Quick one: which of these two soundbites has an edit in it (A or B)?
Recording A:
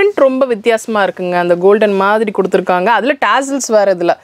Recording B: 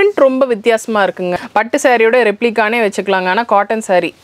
B